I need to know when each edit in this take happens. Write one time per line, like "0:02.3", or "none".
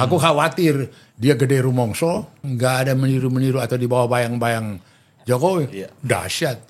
0:02.5